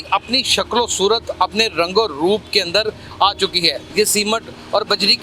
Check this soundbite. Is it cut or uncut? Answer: cut